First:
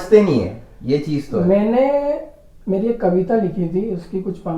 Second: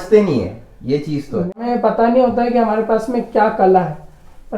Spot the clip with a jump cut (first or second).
second